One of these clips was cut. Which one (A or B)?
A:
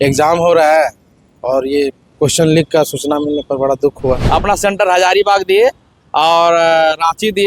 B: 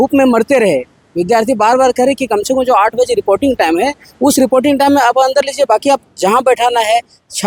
A